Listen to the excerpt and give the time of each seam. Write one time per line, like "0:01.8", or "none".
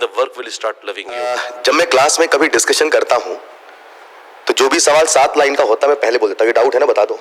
0:01.4